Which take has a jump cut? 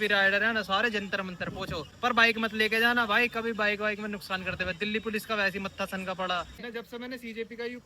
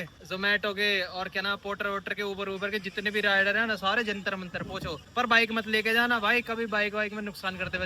first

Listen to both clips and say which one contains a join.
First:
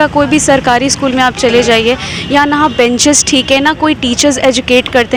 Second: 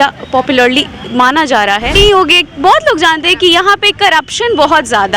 second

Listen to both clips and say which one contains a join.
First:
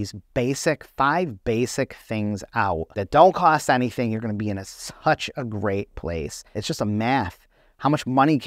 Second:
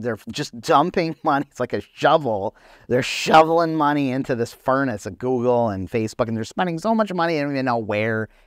first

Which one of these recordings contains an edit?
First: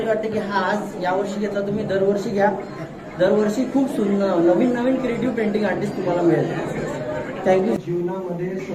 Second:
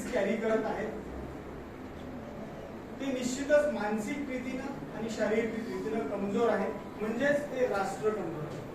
first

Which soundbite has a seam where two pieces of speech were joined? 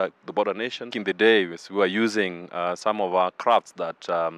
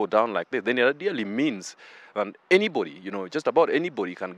first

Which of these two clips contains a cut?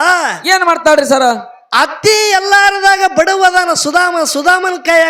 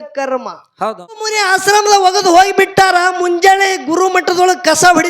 second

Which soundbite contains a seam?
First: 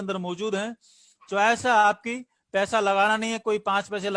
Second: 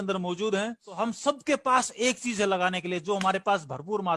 second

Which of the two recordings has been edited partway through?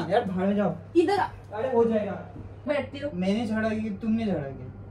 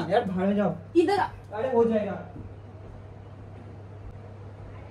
first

